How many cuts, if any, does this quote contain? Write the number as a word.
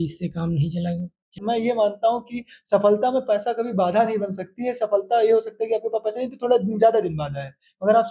one